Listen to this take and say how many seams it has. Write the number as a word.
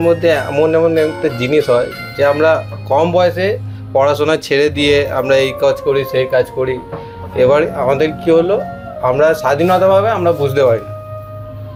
zero